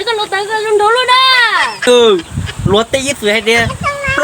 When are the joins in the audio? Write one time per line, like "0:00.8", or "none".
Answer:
0:01.9